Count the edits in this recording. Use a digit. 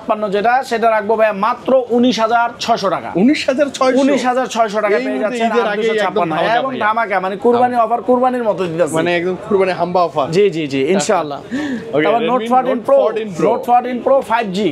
0